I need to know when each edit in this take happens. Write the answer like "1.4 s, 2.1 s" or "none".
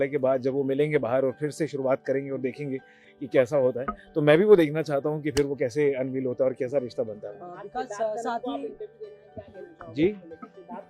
none